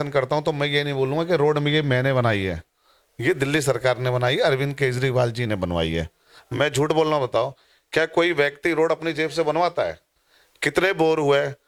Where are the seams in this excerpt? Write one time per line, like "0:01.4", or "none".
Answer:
none